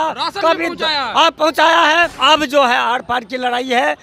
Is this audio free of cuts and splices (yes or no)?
no